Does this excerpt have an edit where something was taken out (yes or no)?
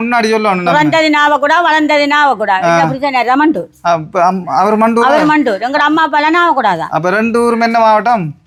no